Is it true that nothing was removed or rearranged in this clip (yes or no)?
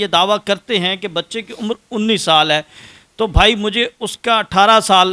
yes